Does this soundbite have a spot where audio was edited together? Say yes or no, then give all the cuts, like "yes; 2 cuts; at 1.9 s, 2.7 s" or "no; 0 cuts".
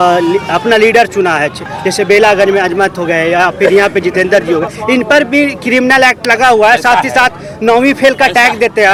no; 0 cuts